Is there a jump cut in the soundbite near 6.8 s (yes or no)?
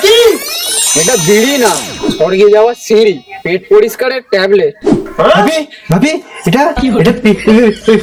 no